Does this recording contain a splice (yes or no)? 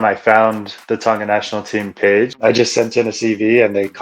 yes